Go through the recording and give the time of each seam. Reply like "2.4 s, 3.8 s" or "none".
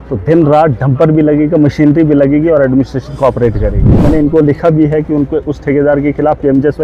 3.9 s